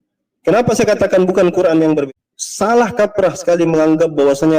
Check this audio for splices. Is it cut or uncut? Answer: cut